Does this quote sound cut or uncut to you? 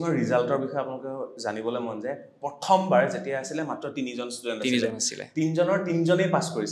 uncut